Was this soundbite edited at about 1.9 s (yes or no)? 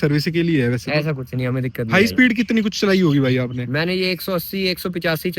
yes